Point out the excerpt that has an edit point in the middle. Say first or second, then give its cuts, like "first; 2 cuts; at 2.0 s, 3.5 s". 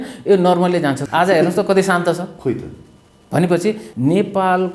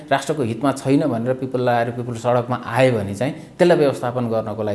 first; 3 cuts; at 1.0 s, 2.3 s, 3.9 s